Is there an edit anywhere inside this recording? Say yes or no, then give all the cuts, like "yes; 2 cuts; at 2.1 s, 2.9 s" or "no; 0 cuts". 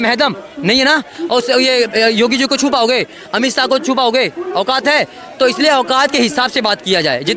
no; 0 cuts